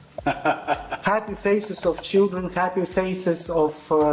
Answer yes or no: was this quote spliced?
no